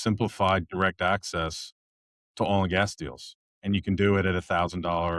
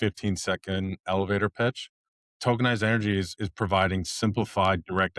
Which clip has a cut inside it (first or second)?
second